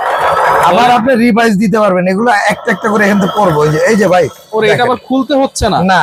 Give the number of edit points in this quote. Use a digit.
0